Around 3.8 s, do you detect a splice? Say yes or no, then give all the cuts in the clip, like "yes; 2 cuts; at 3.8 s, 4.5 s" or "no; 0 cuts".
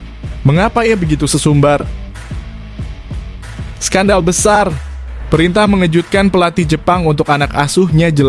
yes; 2 cuts; at 2.0 s, 3.8 s